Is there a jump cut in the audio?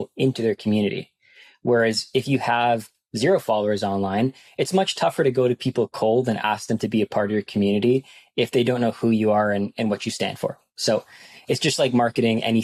no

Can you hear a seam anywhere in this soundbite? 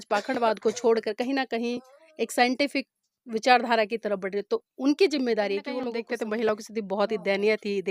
yes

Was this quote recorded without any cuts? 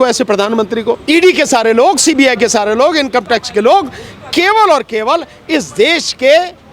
no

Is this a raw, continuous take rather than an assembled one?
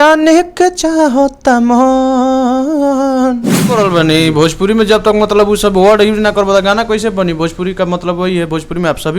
no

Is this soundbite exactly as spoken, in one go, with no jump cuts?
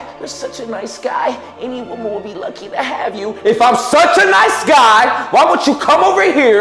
yes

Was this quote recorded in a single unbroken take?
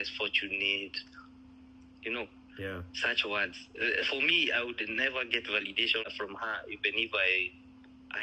no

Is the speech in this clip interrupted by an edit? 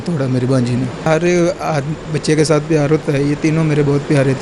yes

